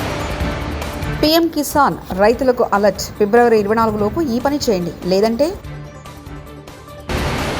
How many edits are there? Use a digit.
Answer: 1